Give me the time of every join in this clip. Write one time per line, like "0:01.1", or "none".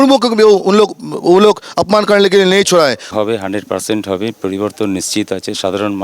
0:03.0